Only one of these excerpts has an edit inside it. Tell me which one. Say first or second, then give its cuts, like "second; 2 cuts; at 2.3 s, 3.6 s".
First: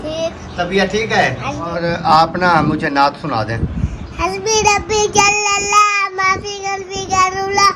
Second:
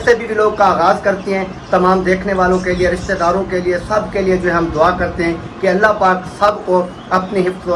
first; 1 cut; at 1.8 s